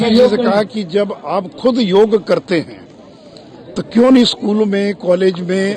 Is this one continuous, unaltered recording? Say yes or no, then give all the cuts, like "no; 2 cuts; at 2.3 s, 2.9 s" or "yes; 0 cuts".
yes; 0 cuts